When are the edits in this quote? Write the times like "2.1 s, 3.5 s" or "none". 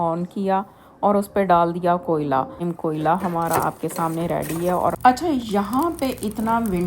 2.7 s, 5.0 s